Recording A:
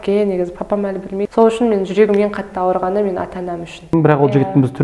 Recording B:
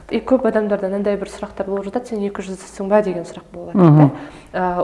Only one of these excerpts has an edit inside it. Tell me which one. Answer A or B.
A